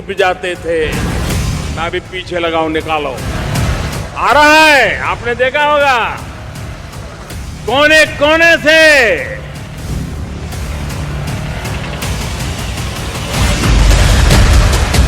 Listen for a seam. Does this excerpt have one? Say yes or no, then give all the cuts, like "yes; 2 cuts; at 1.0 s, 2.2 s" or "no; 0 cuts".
yes; 1 cut; at 13.9 s